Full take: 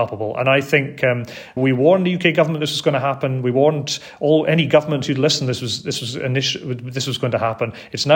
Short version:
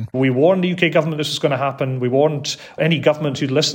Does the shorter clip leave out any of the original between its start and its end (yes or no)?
yes